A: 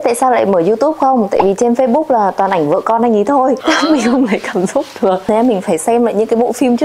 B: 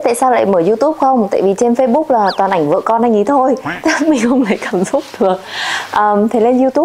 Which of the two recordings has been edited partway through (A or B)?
A